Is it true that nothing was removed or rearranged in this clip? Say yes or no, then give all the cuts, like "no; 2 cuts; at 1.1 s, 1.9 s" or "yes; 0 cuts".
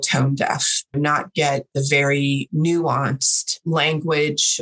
no; 3 cuts; at 0.9 s, 2.5 s, 3.5 s